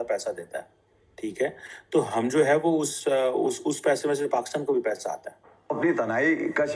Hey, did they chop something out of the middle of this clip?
yes; 1 cut; at 5.7 s

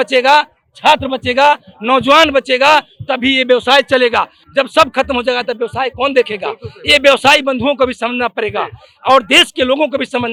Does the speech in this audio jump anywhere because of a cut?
no; 0 cuts

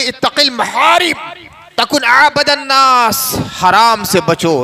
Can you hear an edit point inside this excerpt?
no; 0 cuts

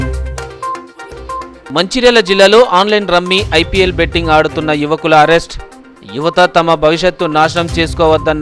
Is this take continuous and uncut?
no; 1 cut; at 1.1 s

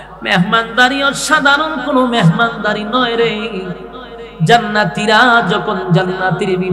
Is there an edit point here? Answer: no; 0 cuts

